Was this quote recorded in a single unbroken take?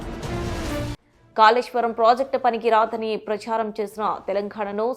no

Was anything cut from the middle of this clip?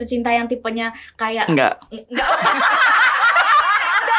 no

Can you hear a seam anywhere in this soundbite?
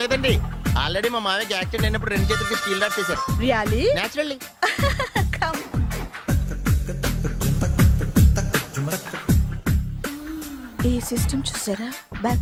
no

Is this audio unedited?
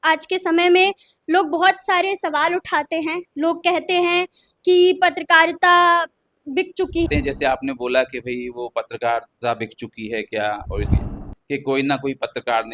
no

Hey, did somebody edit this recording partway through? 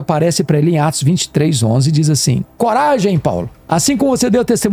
yes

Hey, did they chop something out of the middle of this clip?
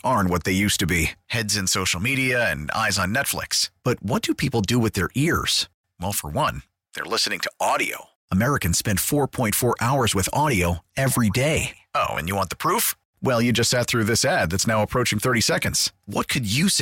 no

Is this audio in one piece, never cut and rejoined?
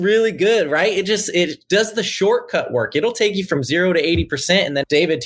yes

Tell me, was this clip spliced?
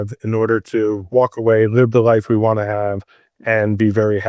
no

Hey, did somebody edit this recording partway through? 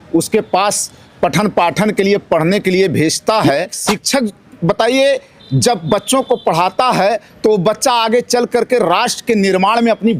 yes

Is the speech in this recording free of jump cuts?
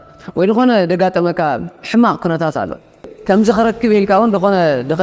no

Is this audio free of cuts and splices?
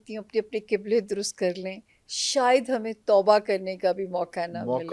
yes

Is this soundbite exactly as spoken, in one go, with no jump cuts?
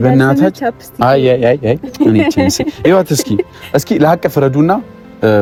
yes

